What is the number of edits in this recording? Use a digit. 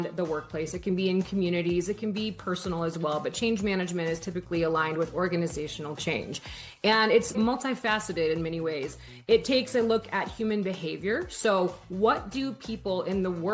1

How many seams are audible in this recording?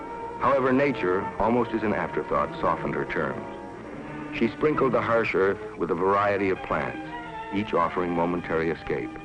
1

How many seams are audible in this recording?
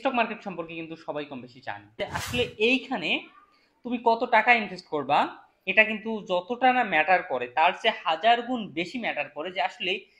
1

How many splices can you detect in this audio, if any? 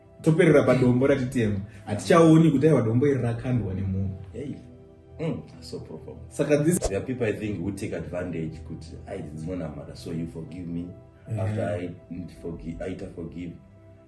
1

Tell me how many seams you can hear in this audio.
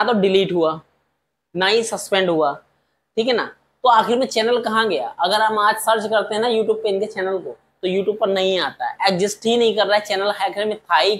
0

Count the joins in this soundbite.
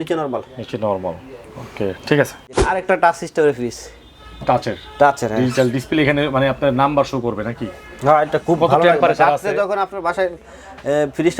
1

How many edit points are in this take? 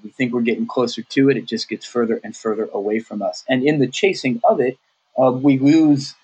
0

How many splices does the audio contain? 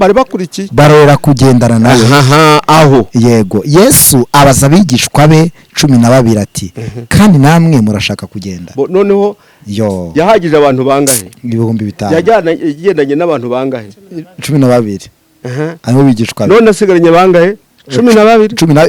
0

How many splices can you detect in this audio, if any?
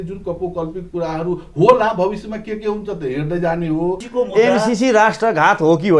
1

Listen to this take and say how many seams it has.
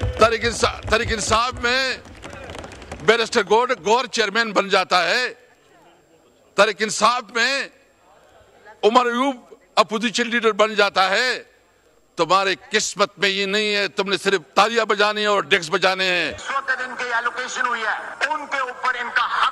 1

